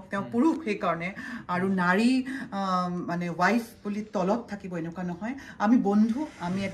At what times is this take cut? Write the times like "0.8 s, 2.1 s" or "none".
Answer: none